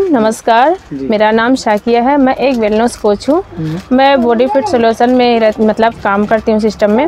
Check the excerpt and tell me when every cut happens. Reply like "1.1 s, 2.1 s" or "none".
none